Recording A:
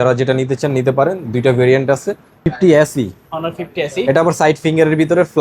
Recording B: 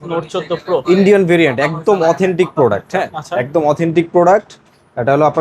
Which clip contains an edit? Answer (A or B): A